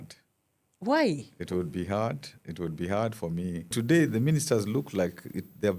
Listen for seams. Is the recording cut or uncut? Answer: cut